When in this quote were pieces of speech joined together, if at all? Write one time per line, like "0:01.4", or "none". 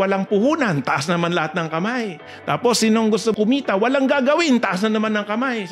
0:03.3